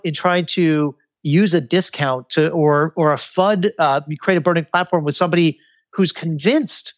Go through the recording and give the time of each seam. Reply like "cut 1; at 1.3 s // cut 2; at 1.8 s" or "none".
none